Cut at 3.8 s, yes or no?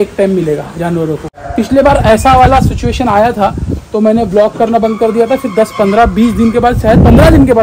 no